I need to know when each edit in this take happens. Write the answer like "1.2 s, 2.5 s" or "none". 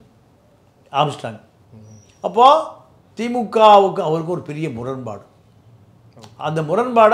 none